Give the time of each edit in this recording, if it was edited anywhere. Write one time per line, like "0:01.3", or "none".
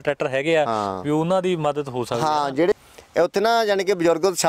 0:02.7